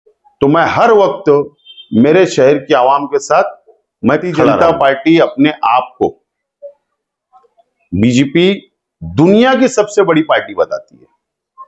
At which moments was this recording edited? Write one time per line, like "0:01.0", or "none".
0:04.6